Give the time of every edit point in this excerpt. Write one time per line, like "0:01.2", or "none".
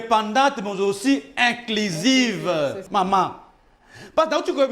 0:02.8